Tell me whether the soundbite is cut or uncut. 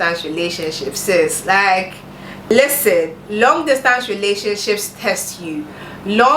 cut